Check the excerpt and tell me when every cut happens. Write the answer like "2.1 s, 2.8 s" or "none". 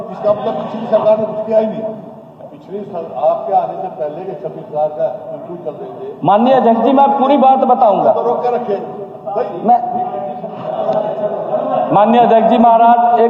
10.5 s

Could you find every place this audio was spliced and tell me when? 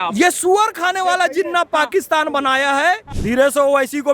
3.1 s

